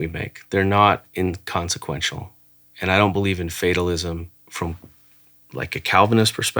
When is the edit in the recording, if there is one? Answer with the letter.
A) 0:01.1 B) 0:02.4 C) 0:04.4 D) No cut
C